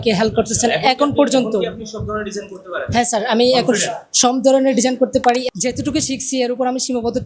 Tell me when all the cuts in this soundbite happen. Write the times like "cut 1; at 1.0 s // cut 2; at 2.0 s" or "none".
cut 1; at 5.5 s